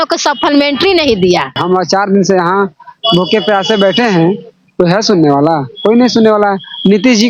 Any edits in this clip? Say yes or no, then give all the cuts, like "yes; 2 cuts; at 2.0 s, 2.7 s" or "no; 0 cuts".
yes; 1 cut; at 1.6 s